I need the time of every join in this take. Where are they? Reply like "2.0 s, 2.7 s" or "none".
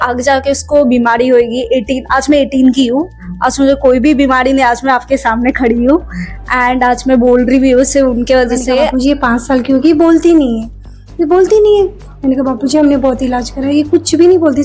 8.9 s